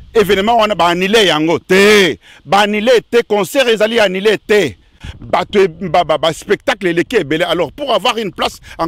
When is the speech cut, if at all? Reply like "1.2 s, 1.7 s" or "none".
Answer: 5.1 s

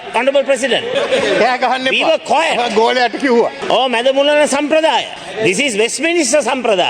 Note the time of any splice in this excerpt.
0.9 s, 3.6 s, 5.2 s

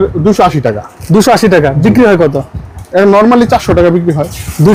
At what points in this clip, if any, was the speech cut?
none

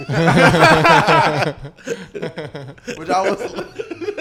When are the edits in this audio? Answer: none

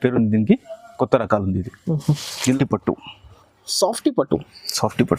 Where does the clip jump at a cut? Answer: 2.6 s

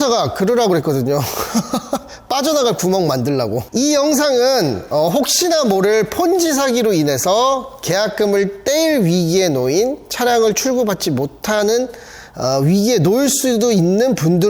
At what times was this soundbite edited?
3.6 s

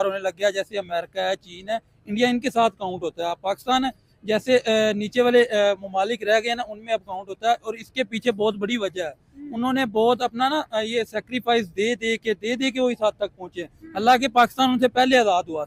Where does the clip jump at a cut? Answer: none

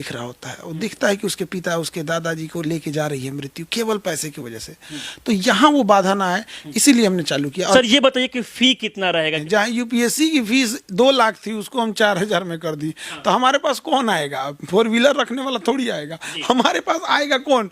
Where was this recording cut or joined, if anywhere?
7.7 s, 9.4 s

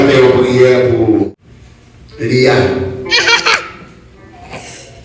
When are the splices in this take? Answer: 1.4 s

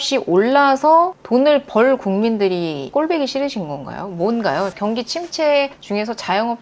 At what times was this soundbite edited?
2.9 s, 4.7 s

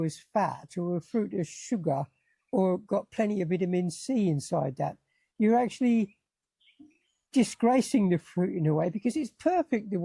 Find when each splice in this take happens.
none

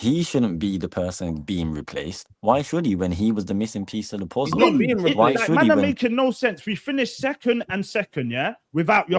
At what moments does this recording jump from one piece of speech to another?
5.7 s

